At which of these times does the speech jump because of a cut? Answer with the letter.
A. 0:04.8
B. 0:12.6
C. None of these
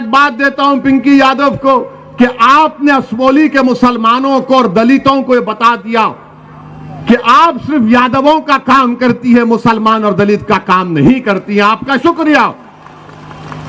C